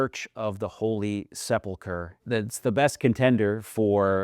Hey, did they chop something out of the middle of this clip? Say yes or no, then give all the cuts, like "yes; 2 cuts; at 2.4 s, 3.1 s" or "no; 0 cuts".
yes; 1 cut; at 2.2 s